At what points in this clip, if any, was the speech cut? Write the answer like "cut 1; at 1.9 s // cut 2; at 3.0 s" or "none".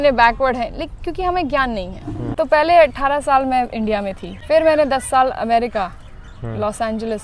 cut 1; at 2.3 s // cut 2; at 4.3 s